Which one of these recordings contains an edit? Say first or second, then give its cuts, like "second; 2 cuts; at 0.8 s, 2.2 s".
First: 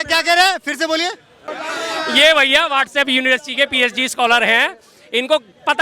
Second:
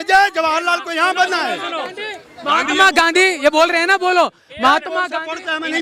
first; 1 cut; at 1.5 s